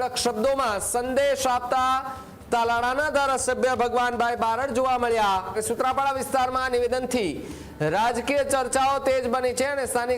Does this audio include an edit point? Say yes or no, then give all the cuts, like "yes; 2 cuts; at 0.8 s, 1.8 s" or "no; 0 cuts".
yes; 1 cut; at 5.6 s